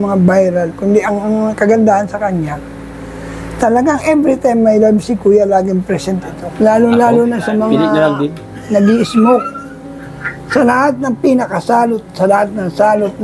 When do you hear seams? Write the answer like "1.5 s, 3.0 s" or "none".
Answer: 6.4 s